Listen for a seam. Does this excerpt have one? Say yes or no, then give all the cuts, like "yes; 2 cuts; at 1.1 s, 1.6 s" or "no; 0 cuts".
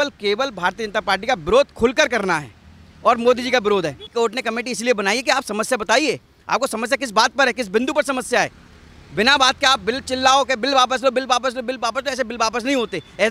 yes; 1 cut; at 4.0 s